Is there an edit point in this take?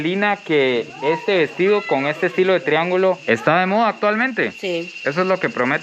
no; 0 cuts

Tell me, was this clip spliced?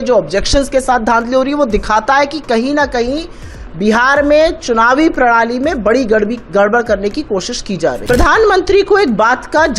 yes; 1 cut; at 8.0 s

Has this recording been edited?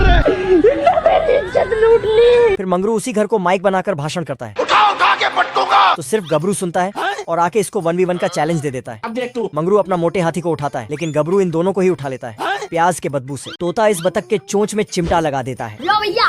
yes; 1 cut; at 13.6 s

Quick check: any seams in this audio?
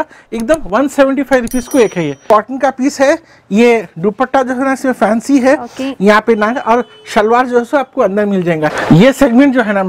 yes; 2 cuts; at 2.2 s, 8.7 s

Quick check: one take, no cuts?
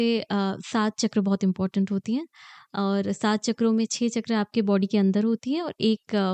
yes; 0 cuts

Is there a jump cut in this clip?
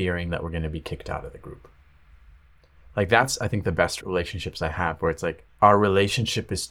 yes; 2 cuts; at 4.0 s, 5.4 s

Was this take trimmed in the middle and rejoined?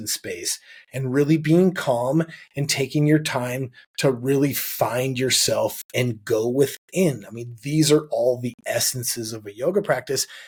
no; 0 cuts

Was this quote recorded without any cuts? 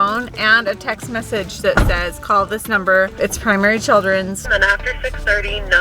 no; 2 cuts; at 3.1 s, 4.5 s

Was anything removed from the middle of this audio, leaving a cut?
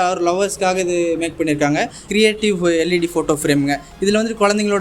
yes; 1 cut; at 2.0 s

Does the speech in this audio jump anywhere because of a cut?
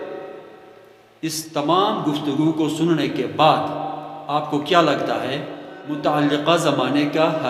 yes; 1 cut; at 5.8 s

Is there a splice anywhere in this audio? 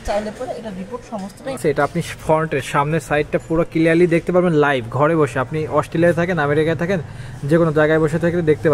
yes; 1 cut; at 1.6 s

